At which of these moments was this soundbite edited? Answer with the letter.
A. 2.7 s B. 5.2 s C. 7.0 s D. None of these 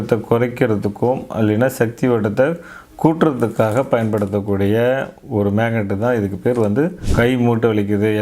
C